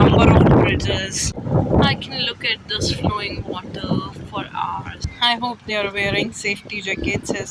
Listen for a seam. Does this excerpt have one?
yes; 2 cuts; at 1.3 s, 5.1 s

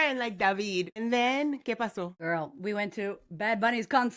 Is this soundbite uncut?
no; 2 cuts; at 0.9 s, 2.2 s

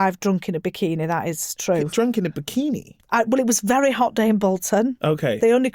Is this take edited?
yes; 1 cut; at 1.9 s

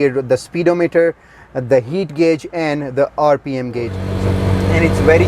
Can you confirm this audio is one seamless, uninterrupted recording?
no; 1 cut; at 4.1 s

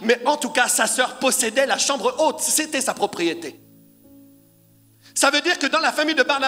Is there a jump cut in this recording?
no; 0 cuts

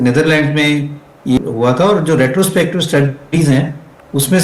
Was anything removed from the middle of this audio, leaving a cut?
yes; 1 cut; at 1.4 s

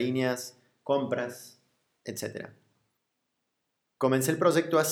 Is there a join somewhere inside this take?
no; 0 cuts

